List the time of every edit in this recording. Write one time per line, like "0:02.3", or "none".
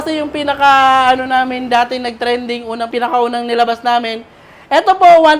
0:02.9